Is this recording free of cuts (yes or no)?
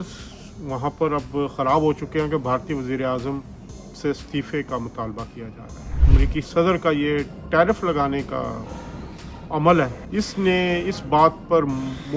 no